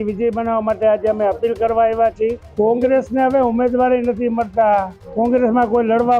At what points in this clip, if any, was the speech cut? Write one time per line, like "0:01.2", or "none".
0:02.4
0:05.0